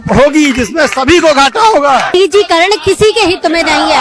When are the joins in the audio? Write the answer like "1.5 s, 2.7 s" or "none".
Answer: 2.1 s